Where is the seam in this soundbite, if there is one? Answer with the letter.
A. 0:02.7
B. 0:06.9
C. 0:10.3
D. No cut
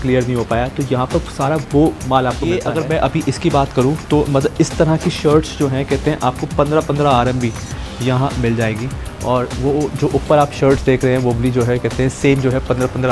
A